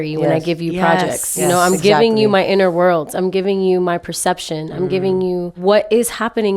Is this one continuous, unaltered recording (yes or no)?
no